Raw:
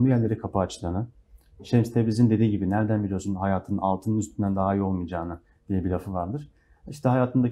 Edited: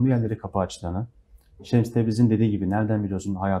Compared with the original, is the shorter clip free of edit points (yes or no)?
yes